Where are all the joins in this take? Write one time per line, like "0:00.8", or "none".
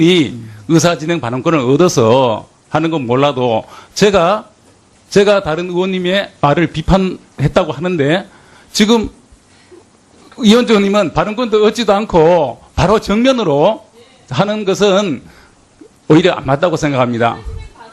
0:11.6